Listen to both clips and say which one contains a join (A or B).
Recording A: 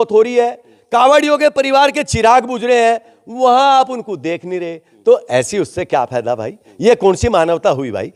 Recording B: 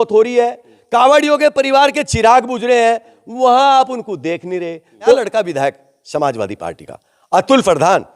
B